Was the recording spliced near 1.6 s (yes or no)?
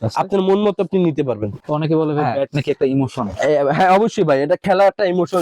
yes